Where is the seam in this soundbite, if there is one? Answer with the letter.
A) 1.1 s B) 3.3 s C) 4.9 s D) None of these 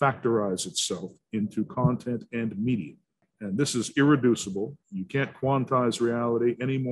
B